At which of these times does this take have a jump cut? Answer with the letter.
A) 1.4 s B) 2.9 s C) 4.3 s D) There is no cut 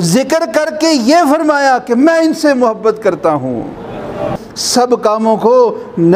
C